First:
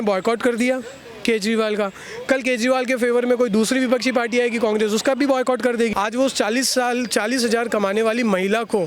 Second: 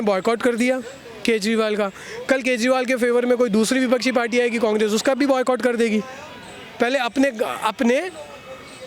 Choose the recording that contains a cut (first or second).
first